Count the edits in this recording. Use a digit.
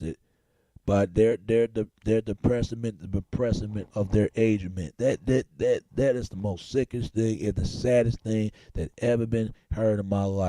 1